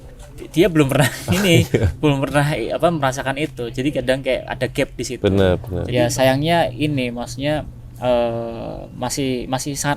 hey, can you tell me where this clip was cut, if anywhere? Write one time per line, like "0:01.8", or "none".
0:05.8

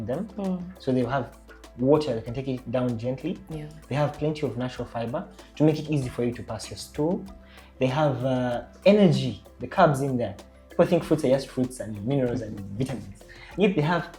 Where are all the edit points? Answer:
none

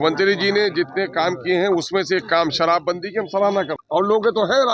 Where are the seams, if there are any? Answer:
0:03.8

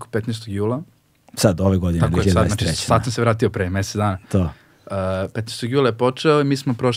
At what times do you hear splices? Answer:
none

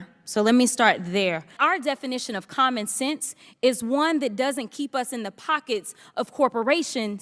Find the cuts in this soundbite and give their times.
0:01.5

